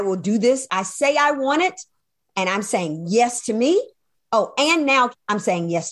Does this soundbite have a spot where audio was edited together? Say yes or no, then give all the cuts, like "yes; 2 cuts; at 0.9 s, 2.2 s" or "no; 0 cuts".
yes; 2 cuts; at 4.0 s, 5.1 s